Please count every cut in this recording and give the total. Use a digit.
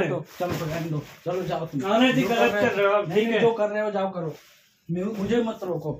0